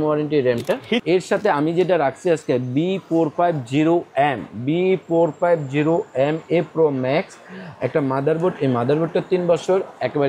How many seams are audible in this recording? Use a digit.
1